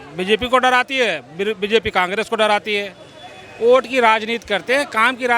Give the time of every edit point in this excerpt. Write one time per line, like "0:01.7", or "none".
none